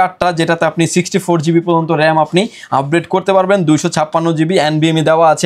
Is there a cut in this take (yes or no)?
no